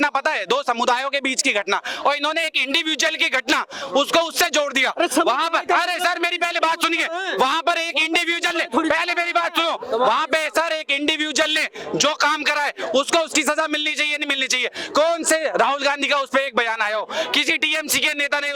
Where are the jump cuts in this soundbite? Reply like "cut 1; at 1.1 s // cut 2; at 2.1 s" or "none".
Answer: none